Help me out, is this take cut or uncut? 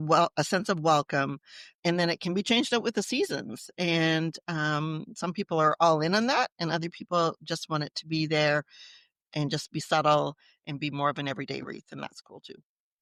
uncut